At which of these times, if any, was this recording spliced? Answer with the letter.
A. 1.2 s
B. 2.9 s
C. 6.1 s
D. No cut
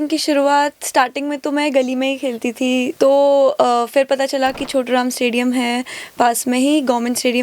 B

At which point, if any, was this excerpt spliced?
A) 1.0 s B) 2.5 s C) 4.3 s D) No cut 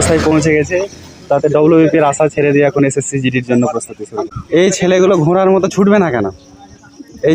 C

